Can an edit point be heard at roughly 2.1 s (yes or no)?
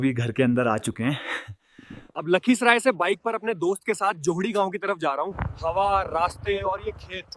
yes